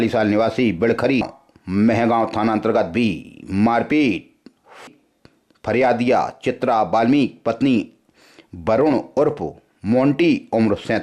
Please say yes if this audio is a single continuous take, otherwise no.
no